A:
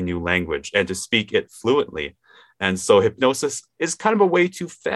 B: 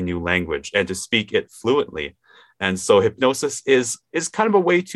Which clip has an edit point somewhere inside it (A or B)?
A